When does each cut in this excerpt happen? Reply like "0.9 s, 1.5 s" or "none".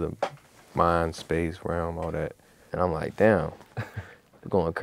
none